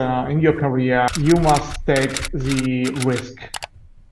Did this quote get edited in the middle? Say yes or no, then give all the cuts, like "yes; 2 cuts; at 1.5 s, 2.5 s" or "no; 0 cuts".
yes; 1 cut; at 1.1 s